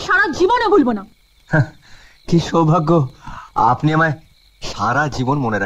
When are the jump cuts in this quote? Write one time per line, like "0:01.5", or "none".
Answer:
none